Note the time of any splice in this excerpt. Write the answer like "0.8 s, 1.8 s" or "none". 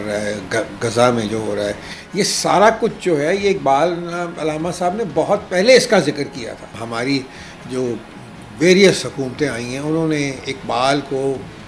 6.8 s